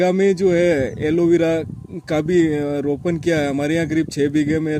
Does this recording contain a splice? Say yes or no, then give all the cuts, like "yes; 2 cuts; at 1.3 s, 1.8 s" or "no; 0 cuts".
no; 0 cuts